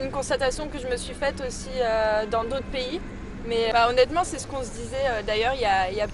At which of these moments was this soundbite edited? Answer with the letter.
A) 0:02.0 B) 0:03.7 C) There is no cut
B